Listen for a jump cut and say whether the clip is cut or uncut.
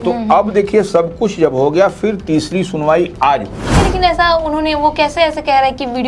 cut